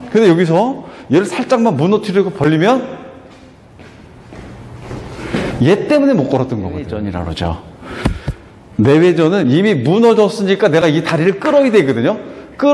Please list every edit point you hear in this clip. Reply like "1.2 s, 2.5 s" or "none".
6.8 s